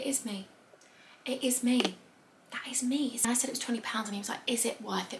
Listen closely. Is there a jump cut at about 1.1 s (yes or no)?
no